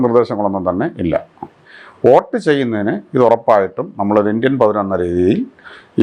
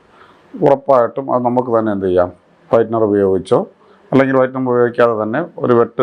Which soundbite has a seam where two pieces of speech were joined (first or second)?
first